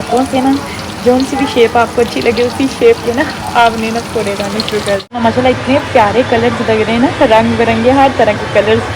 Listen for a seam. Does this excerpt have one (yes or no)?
yes